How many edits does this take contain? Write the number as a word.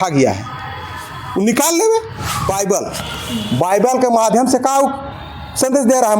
one